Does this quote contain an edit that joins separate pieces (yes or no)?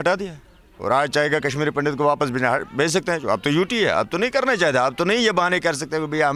no